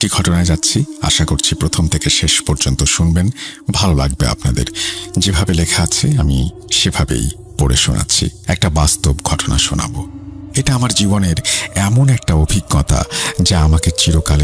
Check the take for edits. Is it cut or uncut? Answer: cut